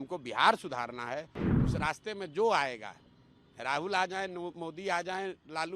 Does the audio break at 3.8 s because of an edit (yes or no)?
no